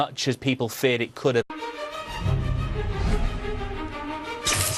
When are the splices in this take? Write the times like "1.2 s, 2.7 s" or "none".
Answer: none